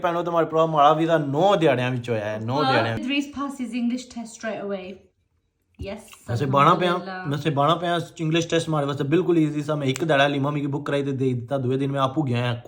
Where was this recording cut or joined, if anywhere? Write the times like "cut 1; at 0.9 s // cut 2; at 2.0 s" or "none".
cut 1; at 3.0 s